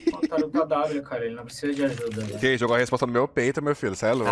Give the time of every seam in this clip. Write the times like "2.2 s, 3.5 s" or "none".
2.3 s